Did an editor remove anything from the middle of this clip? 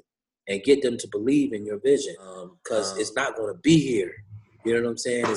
yes; 1 cut; at 2.5 s

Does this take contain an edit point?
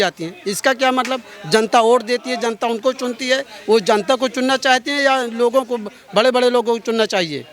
no; 0 cuts

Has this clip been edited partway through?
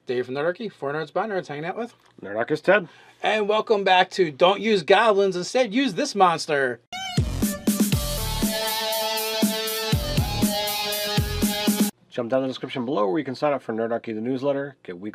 no; 0 cuts

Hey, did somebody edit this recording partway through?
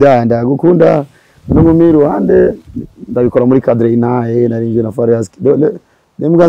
no; 0 cuts

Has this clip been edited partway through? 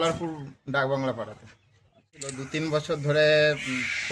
yes; 1 cut; at 2.4 s

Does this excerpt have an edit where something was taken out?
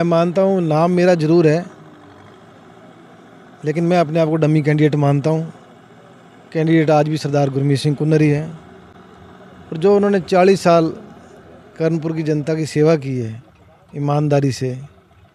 no; 0 cuts

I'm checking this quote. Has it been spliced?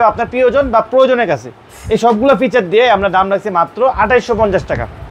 no; 0 cuts

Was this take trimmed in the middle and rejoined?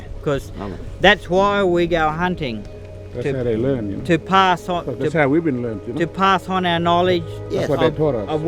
no; 0 cuts

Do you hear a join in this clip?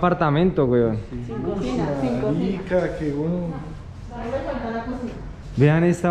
no; 0 cuts

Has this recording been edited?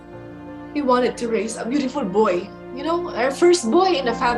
no; 0 cuts

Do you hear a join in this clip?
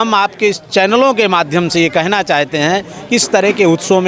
no; 0 cuts

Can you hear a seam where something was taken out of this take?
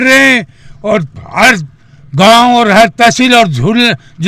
no; 0 cuts

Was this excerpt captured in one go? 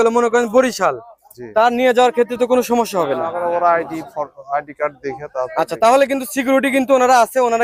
yes; 0 cuts

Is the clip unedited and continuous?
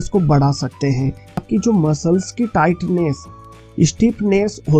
no; 1 cut; at 1.4 s

